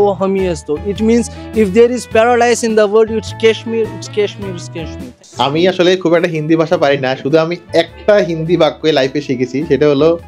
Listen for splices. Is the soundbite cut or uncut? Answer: cut